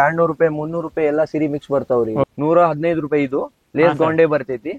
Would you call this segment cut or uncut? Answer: cut